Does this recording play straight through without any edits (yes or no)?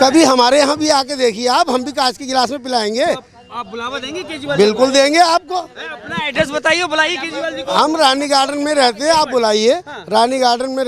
yes